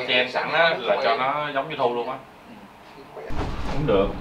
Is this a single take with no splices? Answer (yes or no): no